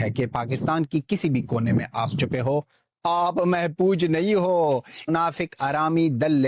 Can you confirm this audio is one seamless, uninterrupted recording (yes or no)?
no